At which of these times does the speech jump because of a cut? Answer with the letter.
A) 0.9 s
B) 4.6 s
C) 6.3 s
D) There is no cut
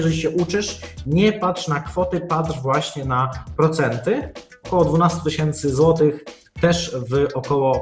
B